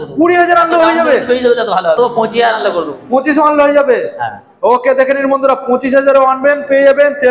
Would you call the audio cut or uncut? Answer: cut